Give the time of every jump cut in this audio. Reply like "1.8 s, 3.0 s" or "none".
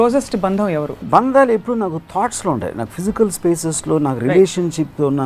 1.0 s